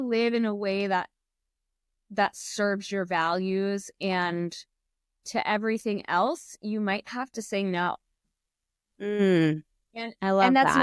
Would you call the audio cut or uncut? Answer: uncut